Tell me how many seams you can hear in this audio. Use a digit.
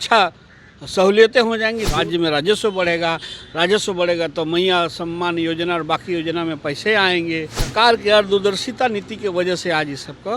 2